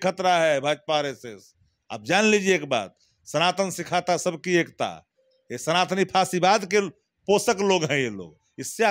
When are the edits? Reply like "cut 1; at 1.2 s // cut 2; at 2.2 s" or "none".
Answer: none